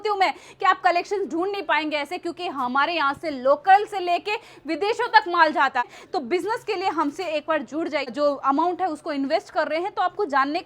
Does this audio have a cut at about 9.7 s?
no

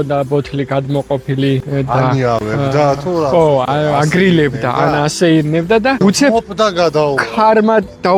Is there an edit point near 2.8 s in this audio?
no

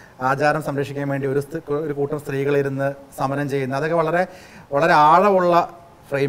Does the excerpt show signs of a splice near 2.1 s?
no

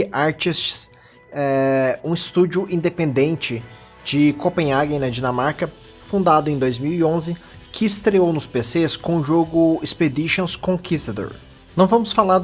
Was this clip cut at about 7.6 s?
no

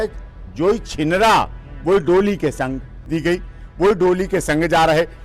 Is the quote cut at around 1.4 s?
no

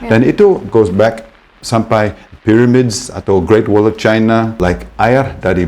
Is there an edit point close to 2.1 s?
no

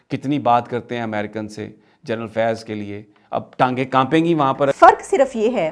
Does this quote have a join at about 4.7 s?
yes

